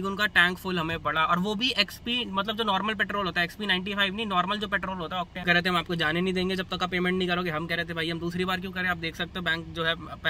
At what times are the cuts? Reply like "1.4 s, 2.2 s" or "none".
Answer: 5.4 s